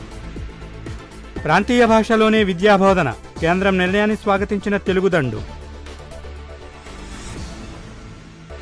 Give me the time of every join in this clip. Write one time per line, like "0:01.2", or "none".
none

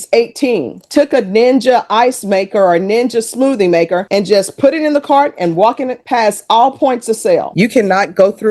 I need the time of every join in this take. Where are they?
0:00.9
0:07.5

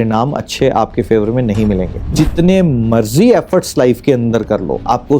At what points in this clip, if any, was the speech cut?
0:02.0

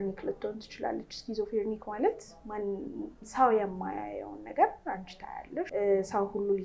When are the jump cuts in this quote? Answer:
0:05.7

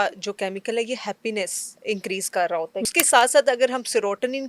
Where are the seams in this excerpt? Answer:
0:01.7
0:02.9

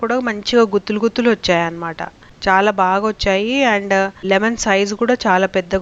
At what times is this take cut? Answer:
none

